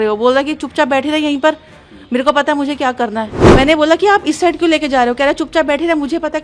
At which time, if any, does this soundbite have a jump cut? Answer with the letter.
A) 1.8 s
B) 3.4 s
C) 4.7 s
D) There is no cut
B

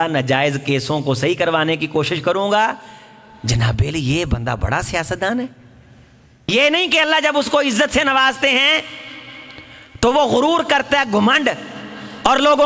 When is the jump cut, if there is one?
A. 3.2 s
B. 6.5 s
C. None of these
B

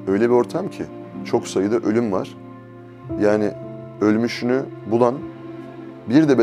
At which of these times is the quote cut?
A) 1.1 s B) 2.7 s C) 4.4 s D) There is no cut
A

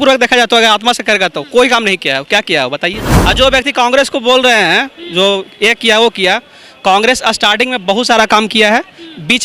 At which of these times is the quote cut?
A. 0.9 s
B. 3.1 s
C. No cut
B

